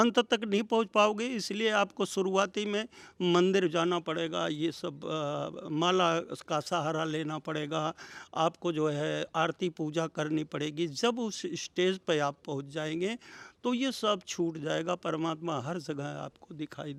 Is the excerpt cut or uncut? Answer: uncut